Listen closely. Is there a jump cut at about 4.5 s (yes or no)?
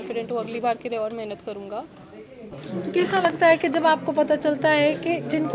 no